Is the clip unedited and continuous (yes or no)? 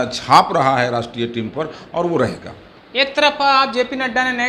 yes